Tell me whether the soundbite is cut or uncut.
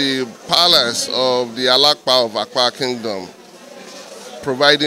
uncut